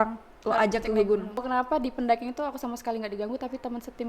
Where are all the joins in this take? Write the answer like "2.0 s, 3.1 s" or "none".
1.4 s